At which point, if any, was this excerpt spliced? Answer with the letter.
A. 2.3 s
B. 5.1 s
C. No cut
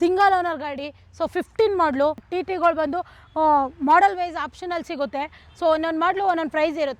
A